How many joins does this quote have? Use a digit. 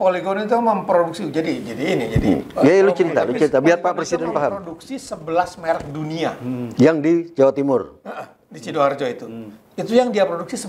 0